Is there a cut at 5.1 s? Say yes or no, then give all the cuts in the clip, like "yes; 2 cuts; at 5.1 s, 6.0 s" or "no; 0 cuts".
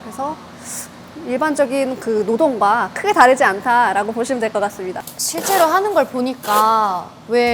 yes; 1 cut; at 5.1 s